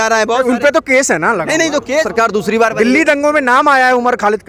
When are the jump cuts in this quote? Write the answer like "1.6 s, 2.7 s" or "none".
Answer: 2.1 s